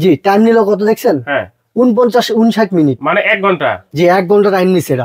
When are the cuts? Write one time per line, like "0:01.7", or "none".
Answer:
none